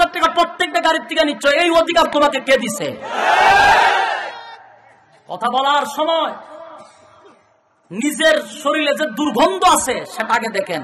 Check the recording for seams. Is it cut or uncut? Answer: uncut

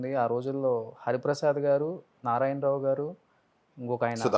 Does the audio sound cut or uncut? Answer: uncut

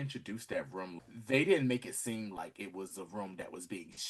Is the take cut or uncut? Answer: cut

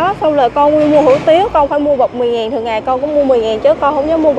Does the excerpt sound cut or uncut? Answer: uncut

